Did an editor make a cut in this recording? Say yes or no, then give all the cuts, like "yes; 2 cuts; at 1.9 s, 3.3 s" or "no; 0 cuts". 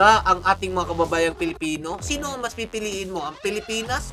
no; 0 cuts